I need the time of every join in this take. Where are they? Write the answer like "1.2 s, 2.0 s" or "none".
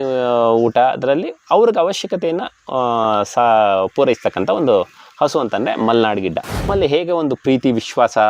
6.7 s